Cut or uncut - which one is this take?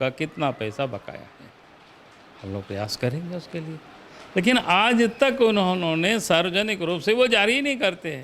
uncut